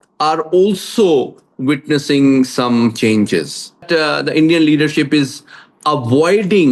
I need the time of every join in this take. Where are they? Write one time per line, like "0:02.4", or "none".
0:03.8